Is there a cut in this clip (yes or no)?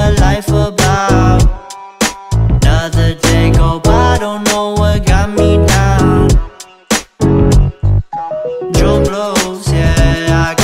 yes